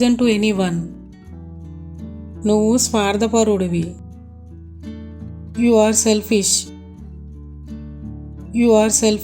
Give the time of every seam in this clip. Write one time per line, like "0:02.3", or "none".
0:00.9
0:02.4
0:03.9
0:05.4
0:06.6
0:08.5